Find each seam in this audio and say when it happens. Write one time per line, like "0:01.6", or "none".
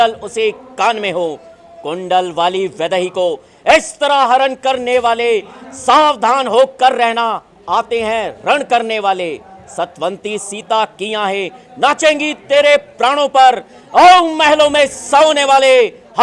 none

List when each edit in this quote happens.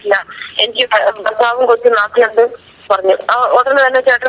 0:02.8

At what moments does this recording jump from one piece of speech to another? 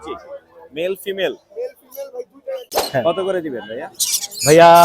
0:02.8

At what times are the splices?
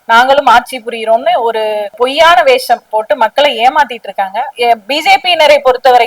0:02.9
0:04.5

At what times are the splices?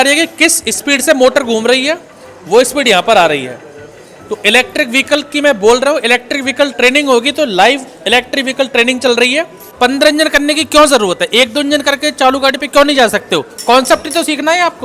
0:09.7

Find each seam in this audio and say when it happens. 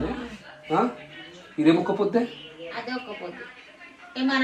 none

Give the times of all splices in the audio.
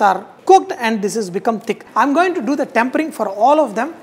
0:01.8

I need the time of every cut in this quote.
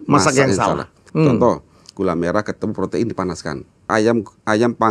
0:01.0
0:03.9

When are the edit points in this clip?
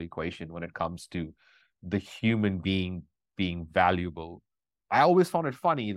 none

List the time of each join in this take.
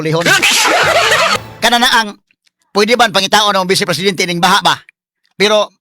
0:01.3

